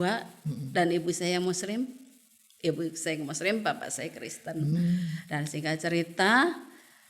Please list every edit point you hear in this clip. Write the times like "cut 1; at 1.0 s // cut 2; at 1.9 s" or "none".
none